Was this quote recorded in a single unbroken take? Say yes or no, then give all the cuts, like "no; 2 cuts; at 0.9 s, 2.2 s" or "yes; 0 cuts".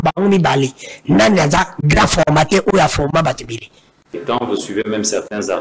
no; 1 cut; at 4.1 s